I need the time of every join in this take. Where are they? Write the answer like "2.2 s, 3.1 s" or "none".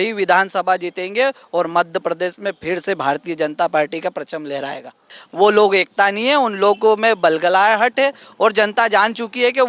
5.2 s